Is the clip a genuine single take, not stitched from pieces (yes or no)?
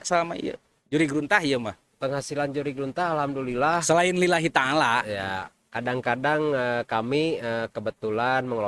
yes